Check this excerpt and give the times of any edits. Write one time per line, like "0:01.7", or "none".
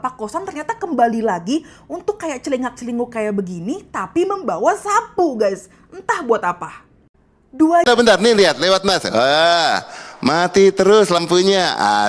0:07.8